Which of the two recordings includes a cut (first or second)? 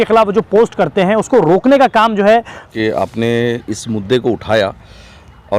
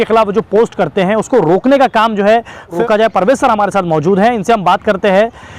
first